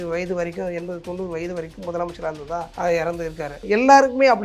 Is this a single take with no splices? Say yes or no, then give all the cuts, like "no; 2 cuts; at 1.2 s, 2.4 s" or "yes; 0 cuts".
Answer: no; 2 cuts; at 2.7 s, 3.6 s